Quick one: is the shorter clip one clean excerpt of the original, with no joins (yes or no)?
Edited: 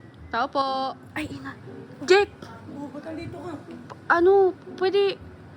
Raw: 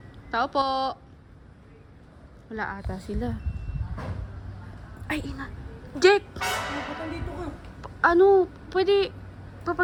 no